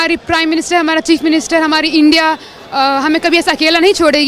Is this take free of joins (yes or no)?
yes